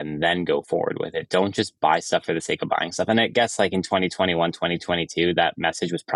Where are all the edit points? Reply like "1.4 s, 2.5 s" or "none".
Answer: none